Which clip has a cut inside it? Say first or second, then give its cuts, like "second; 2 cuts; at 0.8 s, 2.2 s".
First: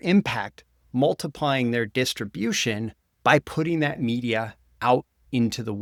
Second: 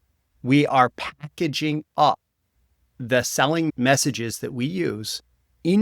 second; 1 cut; at 3.7 s